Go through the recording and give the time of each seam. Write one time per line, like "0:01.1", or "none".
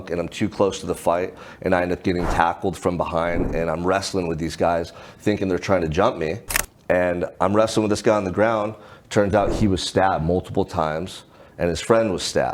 none